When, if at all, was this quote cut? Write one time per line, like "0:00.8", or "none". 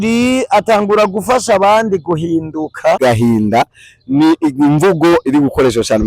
0:03.0